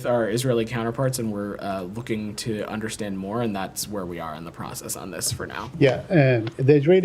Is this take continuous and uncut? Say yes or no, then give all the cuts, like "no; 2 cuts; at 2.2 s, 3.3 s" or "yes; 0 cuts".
no; 1 cut; at 5.7 s